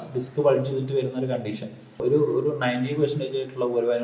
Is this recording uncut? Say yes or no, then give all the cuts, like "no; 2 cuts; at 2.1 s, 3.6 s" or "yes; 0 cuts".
no; 1 cut; at 2.0 s